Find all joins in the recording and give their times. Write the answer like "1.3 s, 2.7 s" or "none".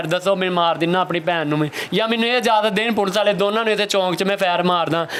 none